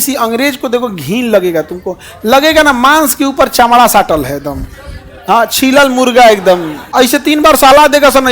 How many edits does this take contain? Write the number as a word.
one